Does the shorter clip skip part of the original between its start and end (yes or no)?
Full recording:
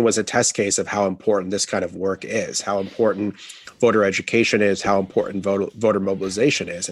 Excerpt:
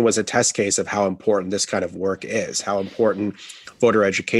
no